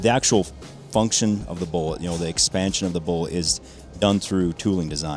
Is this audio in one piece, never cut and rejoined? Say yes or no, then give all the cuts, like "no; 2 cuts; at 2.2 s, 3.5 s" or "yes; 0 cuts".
yes; 0 cuts